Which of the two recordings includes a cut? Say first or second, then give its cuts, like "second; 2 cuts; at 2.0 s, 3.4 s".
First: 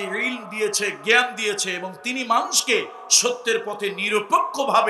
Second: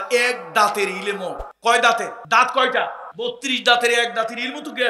second; 3 cuts; at 1.5 s, 2.2 s, 3.0 s